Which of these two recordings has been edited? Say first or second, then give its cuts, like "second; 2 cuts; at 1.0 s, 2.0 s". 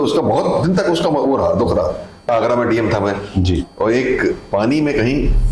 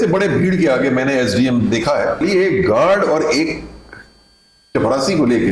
first; 1 cut; at 2.3 s